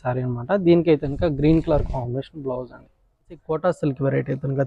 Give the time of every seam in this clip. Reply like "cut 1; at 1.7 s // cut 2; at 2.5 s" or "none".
cut 1; at 3.4 s